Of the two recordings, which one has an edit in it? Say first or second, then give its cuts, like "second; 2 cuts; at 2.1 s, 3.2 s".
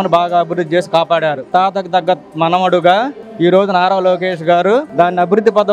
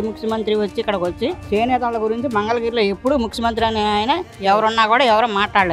first; 1 cut; at 1.5 s